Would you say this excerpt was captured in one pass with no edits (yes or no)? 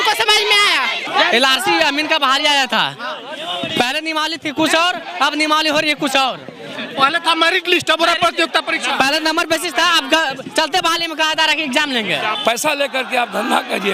no